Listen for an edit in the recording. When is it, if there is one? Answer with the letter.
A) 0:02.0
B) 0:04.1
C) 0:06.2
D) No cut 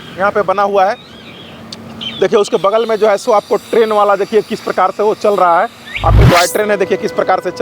C